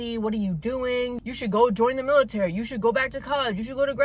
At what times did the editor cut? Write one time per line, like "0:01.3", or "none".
0:01.2